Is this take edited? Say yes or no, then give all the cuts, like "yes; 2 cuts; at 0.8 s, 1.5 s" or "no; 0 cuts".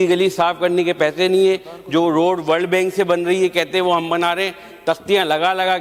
no; 0 cuts